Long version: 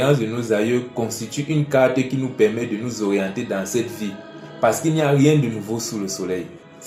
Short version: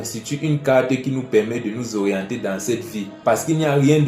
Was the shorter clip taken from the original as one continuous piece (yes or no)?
no